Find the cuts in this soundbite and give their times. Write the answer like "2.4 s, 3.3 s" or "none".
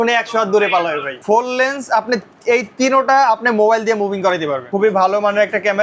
1.2 s, 4.6 s